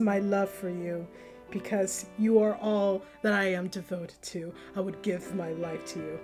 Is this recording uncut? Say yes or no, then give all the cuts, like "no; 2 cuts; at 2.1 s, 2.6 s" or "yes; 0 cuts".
yes; 0 cuts